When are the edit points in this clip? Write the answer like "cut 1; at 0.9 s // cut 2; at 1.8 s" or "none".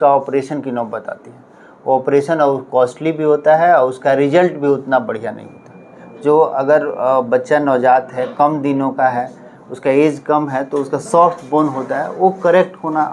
none